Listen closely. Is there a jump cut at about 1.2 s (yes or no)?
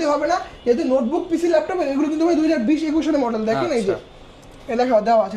no